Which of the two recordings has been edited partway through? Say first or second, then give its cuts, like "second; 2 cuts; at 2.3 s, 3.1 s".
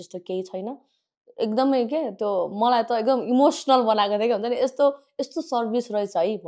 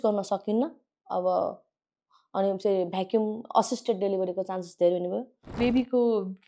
second; 1 cut; at 5.5 s